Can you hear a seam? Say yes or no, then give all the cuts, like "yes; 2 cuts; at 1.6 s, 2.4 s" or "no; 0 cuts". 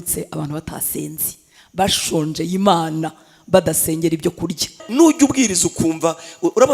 yes; 1 cut; at 4.8 s